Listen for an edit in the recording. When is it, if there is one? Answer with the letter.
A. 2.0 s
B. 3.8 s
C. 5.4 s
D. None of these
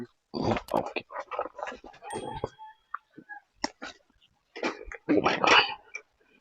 A